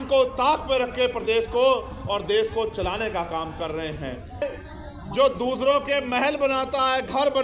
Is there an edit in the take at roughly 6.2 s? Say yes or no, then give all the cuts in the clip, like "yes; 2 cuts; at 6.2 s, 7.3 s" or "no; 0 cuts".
no; 1 cut; at 4.4 s